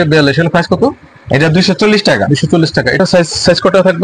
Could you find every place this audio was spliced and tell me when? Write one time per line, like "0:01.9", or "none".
0:03.0